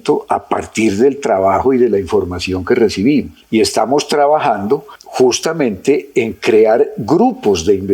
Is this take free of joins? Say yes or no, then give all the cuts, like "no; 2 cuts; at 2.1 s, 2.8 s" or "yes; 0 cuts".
yes; 0 cuts